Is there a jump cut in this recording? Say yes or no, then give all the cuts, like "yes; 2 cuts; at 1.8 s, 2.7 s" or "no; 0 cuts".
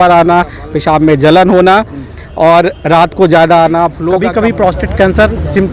yes; 1 cut; at 4.1 s